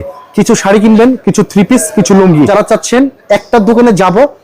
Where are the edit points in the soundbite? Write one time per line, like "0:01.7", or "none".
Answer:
0:02.5

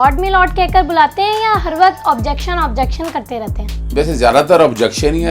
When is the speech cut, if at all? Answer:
0:03.9

